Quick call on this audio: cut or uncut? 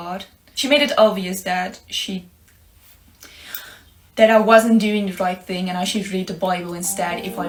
uncut